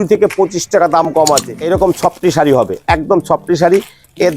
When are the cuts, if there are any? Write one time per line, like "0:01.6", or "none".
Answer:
0:01.5

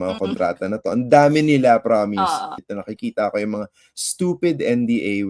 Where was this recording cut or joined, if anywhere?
0:02.6

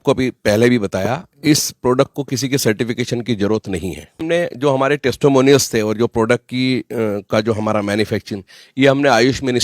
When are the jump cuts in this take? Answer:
0:04.2

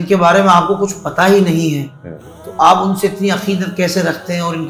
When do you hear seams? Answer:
none

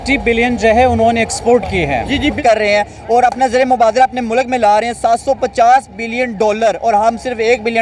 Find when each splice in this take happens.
0:02.4

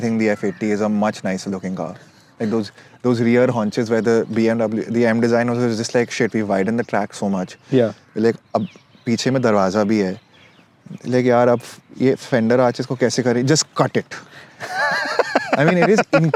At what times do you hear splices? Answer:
none

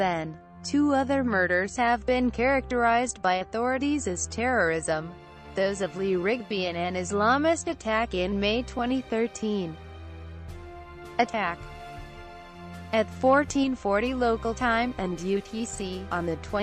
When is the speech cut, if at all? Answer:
0:06.4

